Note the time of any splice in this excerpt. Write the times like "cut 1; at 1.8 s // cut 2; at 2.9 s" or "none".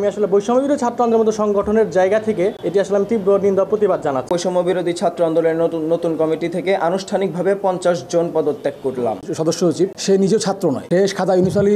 cut 1; at 2.6 s // cut 2; at 4.2 s // cut 3; at 10.0 s // cut 4; at 10.8 s